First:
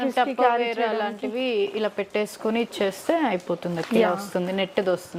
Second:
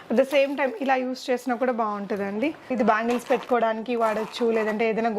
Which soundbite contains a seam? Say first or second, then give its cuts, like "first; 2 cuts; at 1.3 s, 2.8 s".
second; 1 cut; at 2.7 s